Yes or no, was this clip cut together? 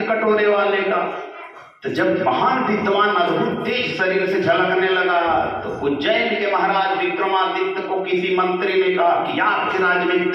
no